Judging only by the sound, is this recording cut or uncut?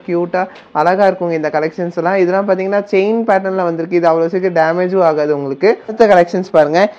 cut